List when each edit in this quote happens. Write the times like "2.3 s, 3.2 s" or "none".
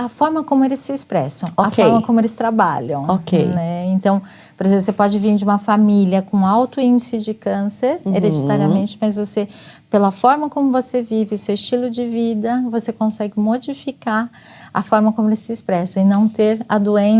none